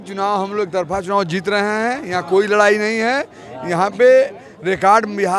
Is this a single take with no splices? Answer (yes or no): yes